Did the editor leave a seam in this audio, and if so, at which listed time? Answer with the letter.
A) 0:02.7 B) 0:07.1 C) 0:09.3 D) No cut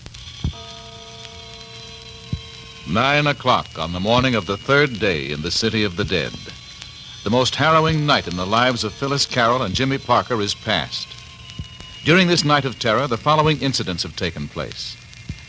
A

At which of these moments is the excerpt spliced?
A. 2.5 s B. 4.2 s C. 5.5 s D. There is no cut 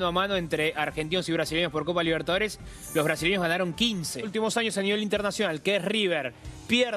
B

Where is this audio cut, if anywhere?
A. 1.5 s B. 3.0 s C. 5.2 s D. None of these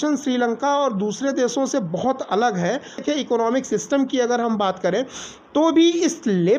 B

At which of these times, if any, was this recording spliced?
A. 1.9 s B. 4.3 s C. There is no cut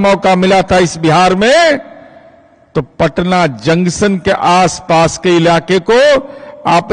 C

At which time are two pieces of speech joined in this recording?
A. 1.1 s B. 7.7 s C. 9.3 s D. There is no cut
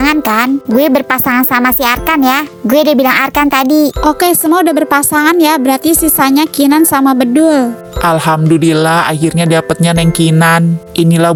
D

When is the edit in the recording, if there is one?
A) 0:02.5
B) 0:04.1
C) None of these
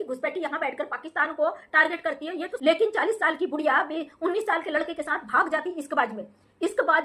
A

